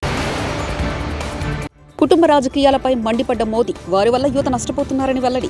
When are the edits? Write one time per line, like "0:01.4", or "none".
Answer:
0:01.8